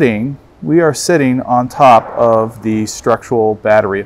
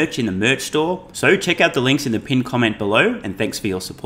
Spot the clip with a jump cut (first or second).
second